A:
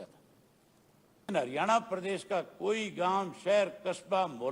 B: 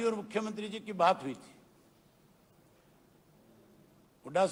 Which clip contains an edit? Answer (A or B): A